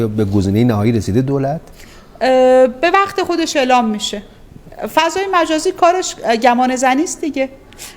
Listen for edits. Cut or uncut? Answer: uncut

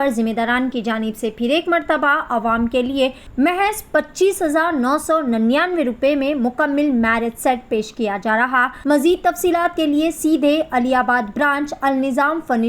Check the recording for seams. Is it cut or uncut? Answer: cut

